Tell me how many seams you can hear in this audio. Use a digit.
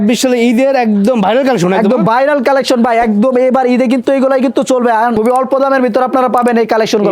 1